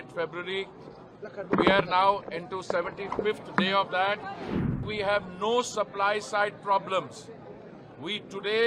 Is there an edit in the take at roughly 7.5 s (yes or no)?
no